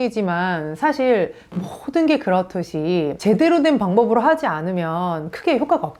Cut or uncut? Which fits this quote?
uncut